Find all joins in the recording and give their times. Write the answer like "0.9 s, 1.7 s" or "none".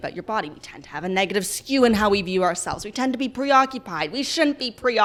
none